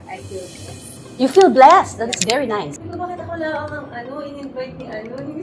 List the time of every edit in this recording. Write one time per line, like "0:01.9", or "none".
0:02.8